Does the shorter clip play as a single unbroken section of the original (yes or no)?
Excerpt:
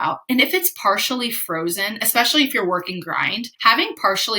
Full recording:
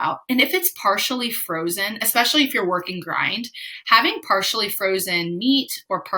no